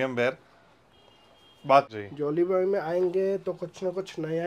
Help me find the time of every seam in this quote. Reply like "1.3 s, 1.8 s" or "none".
1.9 s

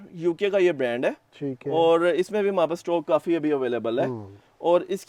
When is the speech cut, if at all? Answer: none

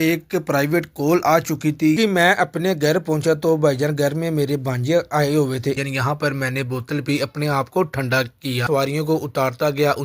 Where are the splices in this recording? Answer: 2.0 s, 5.8 s, 8.6 s

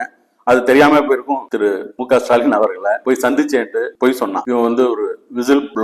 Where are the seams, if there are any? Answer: 1.4 s, 4.4 s

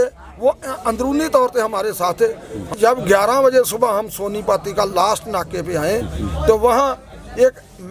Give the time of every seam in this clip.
2.7 s

